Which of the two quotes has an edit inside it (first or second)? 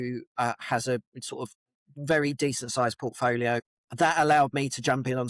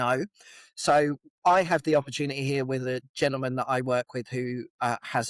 first